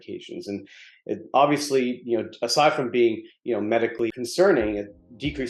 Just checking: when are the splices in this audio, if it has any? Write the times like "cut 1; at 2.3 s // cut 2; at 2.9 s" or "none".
none